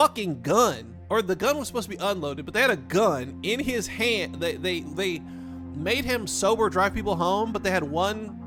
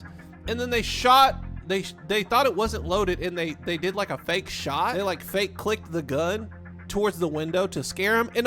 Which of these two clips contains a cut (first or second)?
second